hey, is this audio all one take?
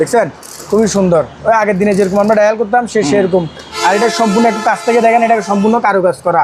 no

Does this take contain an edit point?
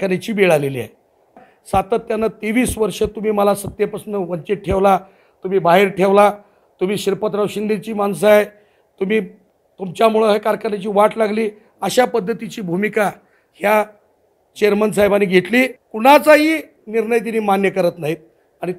yes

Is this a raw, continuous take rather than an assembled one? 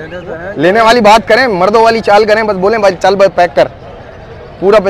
yes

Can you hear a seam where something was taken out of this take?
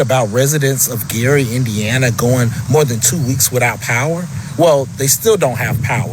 no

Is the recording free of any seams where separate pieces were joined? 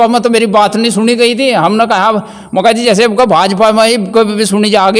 yes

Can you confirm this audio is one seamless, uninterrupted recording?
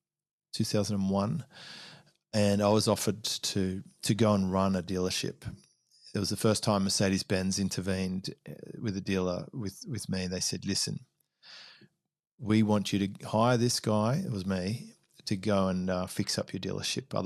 yes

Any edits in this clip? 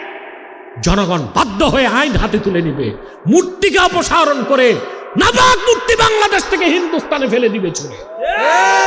no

